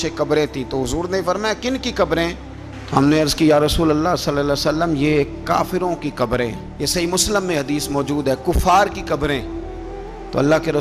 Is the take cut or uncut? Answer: uncut